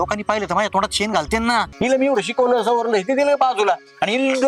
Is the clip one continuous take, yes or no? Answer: no